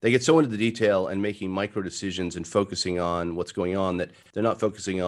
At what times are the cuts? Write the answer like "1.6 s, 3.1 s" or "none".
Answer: none